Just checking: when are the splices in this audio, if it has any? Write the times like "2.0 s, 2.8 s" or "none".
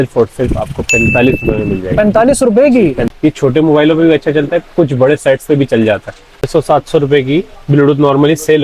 3.0 s, 6.5 s